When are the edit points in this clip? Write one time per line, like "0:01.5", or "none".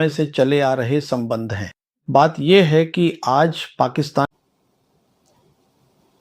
0:04.2